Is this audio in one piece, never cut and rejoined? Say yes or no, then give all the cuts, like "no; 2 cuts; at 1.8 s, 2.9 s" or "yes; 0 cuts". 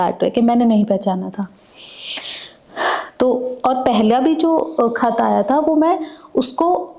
yes; 0 cuts